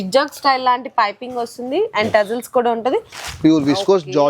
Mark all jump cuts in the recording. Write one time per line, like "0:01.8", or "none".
0:03.2